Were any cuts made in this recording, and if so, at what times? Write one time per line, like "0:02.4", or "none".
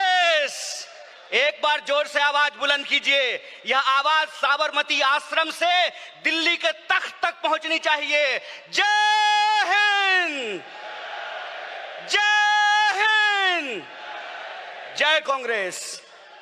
none